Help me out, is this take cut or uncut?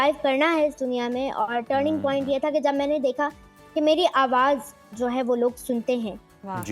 uncut